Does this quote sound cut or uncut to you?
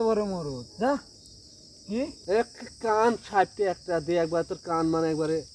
cut